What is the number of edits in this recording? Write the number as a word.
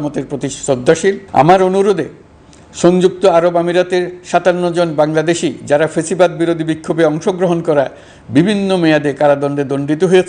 one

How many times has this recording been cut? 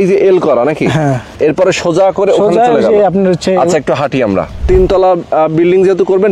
two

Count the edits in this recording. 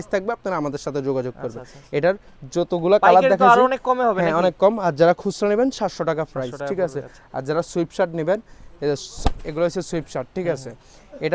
zero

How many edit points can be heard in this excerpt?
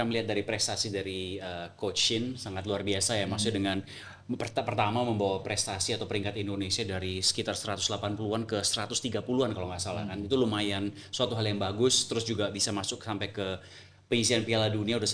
zero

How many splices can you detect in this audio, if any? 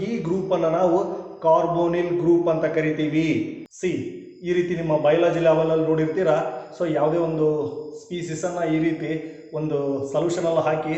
one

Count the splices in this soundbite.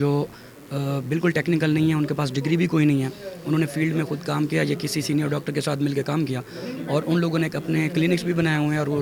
zero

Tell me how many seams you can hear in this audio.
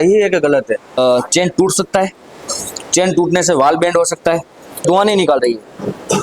two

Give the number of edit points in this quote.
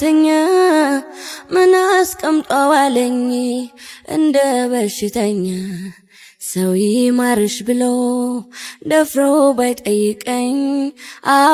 zero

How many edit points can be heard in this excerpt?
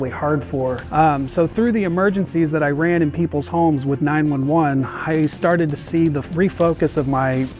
two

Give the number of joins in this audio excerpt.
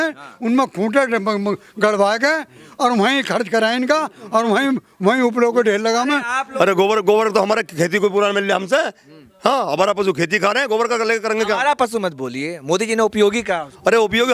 one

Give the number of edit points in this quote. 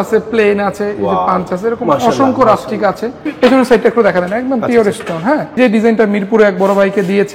two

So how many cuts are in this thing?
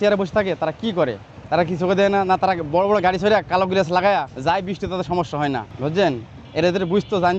three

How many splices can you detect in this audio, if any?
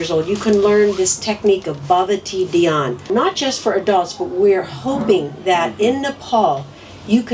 one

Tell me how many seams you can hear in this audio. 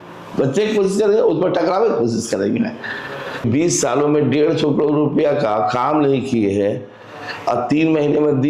one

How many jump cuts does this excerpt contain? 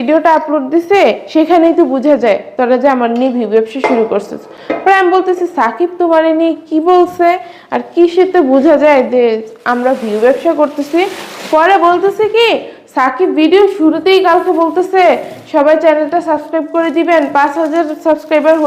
zero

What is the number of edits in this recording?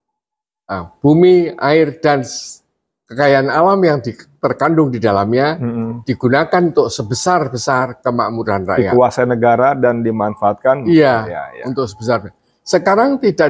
zero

